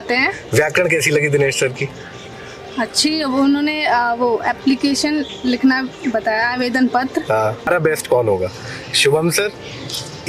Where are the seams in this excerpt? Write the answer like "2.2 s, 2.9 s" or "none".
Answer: 7.6 s